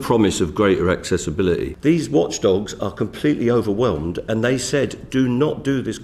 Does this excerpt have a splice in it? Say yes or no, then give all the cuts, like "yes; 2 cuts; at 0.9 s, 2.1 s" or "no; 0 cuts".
yes; 1 cut; at 1.7 s